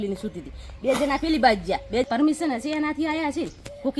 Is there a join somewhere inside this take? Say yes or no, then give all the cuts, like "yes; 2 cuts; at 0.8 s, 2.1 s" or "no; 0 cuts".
yes; 1 cut; at 2.1 s